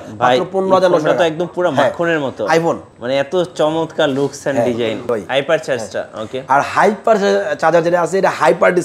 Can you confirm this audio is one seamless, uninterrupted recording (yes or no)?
no